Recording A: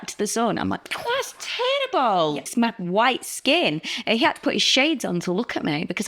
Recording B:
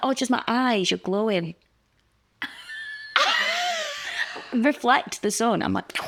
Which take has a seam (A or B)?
A